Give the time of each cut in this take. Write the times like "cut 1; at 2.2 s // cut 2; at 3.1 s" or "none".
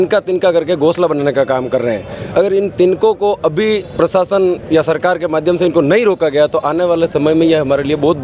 none